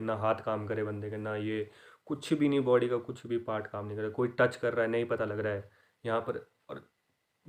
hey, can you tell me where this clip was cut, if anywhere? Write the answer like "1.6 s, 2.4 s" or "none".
none